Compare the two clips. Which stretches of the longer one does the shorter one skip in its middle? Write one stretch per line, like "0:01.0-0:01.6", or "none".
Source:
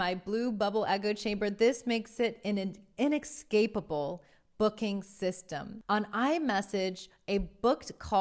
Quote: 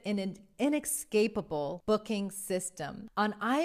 0:04.2-0:04.5